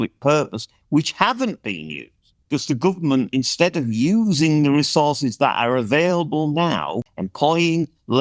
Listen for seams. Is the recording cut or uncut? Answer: cut